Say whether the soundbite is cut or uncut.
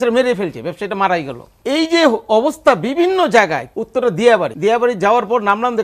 cut